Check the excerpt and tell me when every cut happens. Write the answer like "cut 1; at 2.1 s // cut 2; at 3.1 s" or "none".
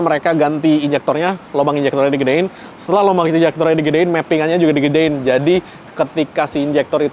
none